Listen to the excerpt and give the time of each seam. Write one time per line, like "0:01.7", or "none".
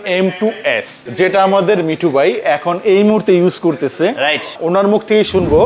0:01.0
0:04.5